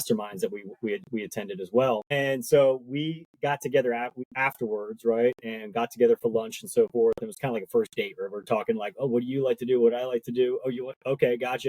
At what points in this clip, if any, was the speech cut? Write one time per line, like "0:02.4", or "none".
0:02.1
0:04.2